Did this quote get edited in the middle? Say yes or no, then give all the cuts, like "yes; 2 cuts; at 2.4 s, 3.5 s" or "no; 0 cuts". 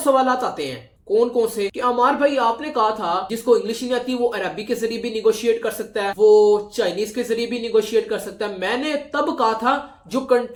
no; 0 cuts